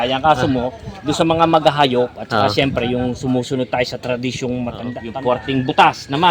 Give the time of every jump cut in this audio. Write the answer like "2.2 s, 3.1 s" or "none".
5.0 s